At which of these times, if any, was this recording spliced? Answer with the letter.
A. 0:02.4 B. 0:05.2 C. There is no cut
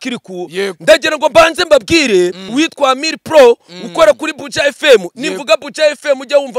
A